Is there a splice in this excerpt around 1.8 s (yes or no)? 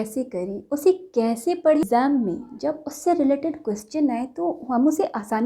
yes